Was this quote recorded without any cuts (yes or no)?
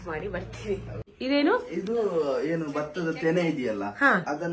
yes